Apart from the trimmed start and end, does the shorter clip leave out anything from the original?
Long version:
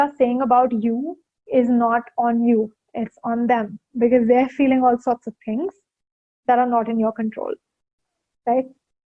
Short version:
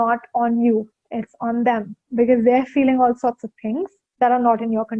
yes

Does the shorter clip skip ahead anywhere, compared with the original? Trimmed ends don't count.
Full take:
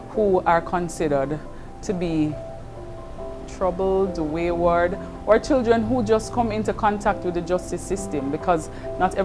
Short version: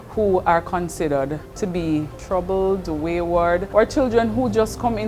yes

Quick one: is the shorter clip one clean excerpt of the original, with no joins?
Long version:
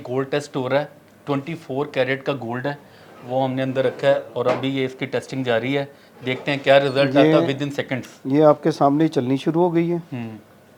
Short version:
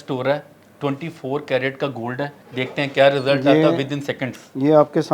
no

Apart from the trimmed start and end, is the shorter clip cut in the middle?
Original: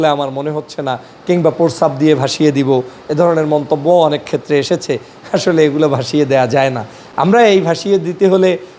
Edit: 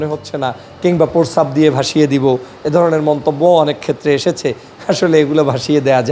no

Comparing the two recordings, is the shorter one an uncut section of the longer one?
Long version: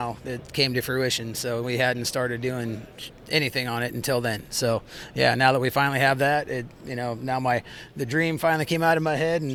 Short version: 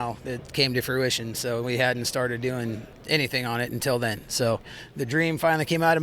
no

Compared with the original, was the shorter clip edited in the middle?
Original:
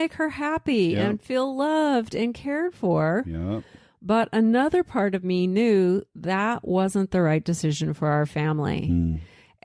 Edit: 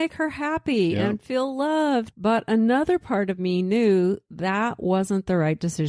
yes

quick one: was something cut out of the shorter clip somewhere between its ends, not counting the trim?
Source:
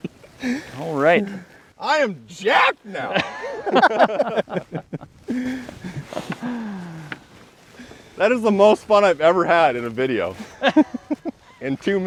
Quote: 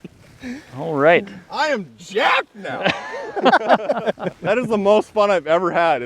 yes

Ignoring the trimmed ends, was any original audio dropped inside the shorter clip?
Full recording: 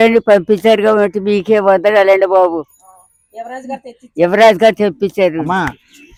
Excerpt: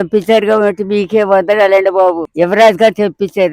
yes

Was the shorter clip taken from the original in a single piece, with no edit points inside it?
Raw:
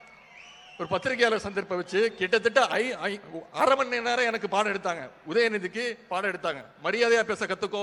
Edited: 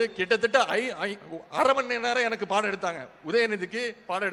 yes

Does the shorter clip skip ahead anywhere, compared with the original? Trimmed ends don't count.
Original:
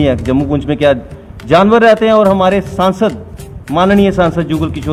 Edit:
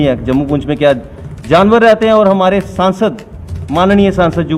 no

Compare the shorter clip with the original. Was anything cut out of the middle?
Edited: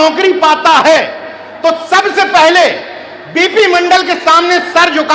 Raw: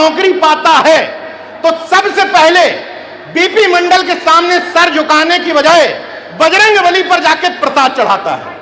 no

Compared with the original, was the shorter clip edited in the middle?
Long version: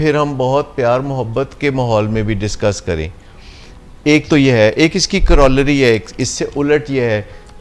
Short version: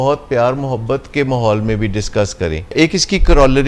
yes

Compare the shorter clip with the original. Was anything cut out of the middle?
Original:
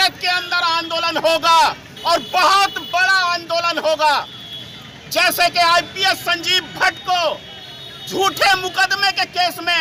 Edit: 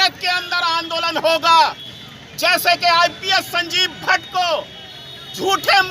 yes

